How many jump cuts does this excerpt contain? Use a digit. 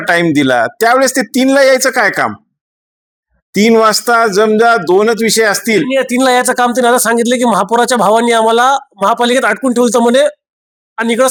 0